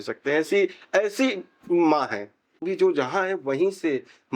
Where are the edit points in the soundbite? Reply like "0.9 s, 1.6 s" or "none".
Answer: 2.4 s